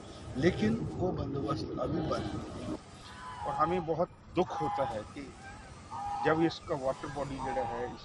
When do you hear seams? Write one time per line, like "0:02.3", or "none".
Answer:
0:02.8